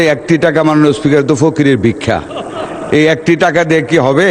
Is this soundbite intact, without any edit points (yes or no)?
yes